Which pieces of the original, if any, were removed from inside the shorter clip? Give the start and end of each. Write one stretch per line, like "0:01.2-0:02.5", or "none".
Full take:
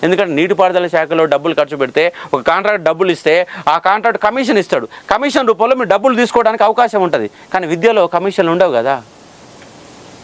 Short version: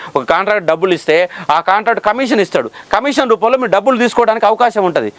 none